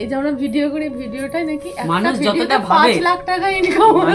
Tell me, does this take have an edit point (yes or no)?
no